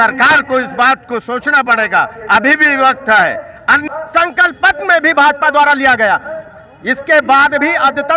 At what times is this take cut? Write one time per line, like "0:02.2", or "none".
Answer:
0:03.8